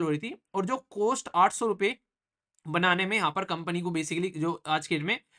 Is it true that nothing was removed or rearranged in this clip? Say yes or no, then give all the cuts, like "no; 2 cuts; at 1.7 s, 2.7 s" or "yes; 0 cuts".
yes; 0 cuts